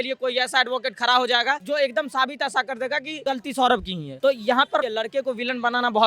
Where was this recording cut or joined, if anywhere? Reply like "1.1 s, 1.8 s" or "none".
1.6 s, 3.2 s, 4.0 s, 4.9 s